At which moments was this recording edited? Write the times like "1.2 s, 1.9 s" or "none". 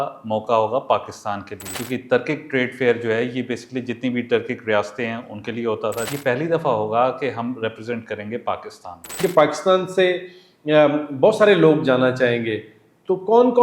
1.7 s, 6.1 s, 9.2 s

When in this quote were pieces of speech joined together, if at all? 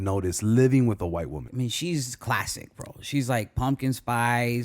1.4 s

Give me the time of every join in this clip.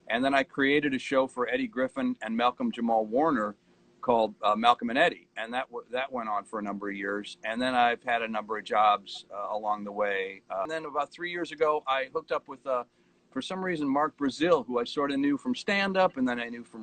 10.6 s

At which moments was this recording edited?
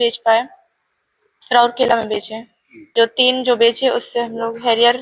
2.9 s

